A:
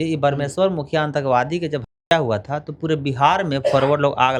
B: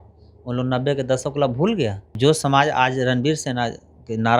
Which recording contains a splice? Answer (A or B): B